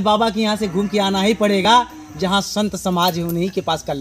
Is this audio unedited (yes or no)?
yes